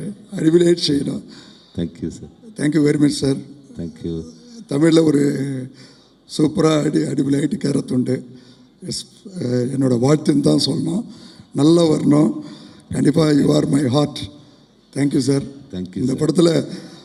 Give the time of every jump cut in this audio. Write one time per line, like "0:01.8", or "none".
none